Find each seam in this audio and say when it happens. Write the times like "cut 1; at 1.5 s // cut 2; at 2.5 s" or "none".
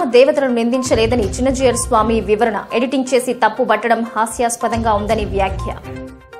none